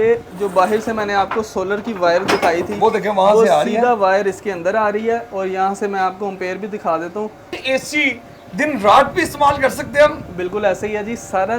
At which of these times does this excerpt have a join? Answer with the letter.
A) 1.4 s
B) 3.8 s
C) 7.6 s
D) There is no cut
C